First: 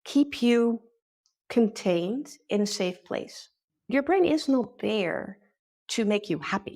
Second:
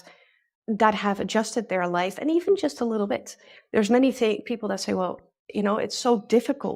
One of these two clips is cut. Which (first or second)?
first